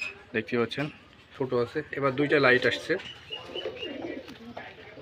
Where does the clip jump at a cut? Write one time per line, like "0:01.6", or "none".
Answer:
0:01.3